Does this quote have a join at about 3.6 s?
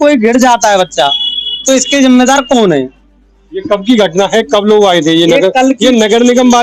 no; 0 cuts

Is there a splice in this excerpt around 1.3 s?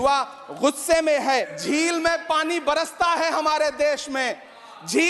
yes; 1 cut; at 1.3 s

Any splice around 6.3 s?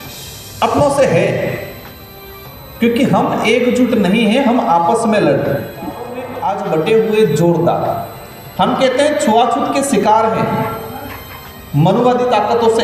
yes; 1 cut; at 6.3 s

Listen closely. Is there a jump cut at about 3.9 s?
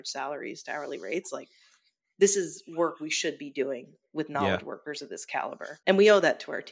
no; 1 cut; at 5.6 s

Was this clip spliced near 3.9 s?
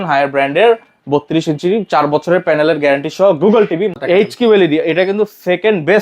yes; 1 cut; at 3.9 s

